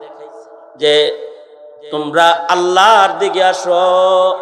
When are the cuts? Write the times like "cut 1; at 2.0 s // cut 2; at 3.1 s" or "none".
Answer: none